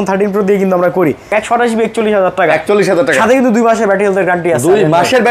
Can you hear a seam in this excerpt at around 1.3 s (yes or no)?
yes